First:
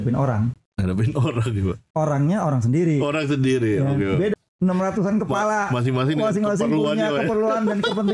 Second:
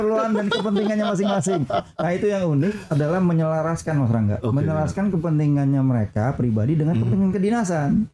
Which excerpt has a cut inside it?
first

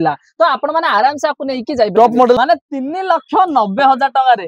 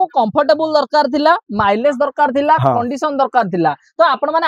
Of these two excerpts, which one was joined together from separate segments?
first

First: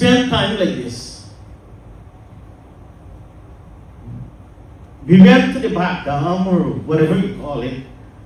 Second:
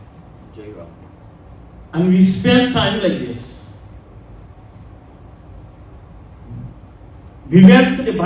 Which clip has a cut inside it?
second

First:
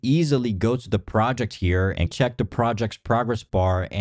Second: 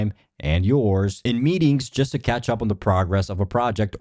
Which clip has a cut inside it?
first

